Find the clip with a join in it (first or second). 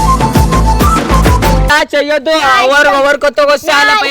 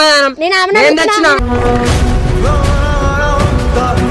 first